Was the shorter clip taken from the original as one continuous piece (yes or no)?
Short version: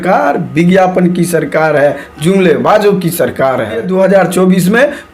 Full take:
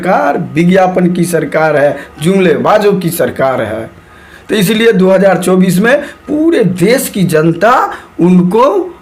no